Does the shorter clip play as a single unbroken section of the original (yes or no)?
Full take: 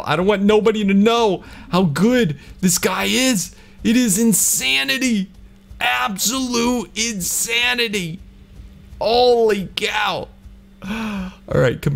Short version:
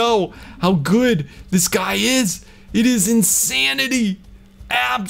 yes